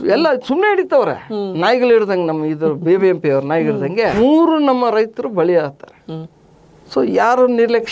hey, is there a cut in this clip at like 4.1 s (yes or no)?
yes